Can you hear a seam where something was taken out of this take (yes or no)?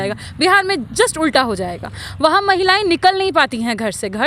no